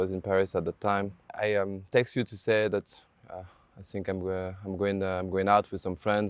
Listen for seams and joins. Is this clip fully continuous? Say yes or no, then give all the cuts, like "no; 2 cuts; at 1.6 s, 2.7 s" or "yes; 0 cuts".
no; 1 cut; at 1.3 s